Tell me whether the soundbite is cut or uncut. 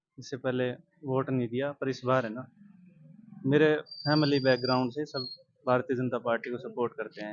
uncut